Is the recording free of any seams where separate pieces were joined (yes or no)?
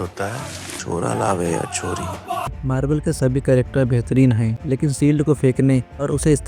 no